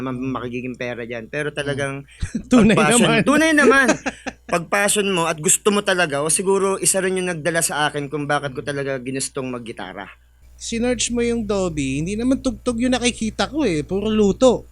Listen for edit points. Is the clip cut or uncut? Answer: cut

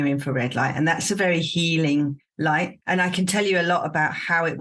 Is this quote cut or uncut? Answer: cut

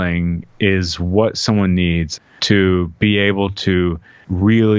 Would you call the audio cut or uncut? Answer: cut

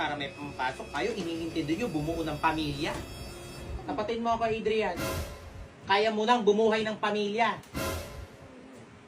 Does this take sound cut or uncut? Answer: cut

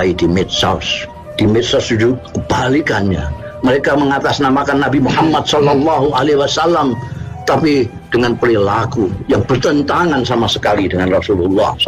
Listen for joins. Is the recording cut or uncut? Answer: uncut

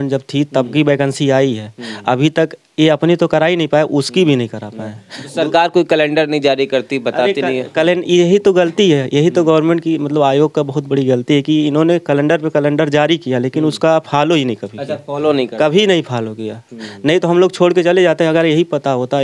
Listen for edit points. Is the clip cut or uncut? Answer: uncut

